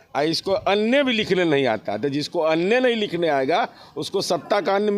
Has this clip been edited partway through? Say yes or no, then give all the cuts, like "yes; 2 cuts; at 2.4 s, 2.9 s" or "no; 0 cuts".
no; 0 cuts